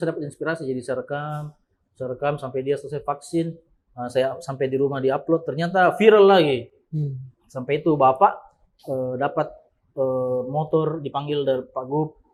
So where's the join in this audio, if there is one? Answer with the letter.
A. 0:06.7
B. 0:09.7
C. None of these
C